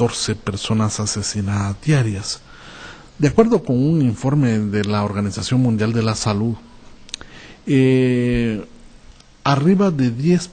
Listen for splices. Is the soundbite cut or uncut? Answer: cut